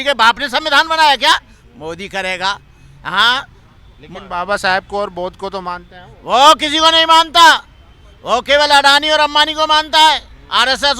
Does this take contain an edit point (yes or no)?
no